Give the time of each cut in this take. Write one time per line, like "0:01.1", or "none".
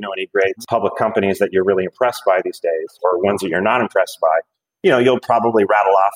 0:02.9